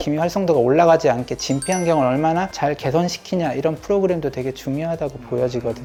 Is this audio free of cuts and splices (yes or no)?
yes